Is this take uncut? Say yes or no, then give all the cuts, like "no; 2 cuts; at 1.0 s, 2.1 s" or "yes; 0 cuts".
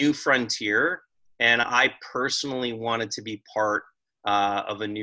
yes; 0 cuts